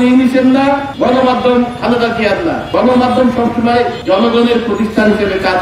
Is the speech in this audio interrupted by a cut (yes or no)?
yes